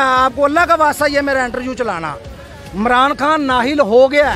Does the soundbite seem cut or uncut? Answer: uncut